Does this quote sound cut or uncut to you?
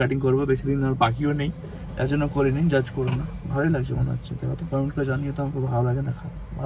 uncut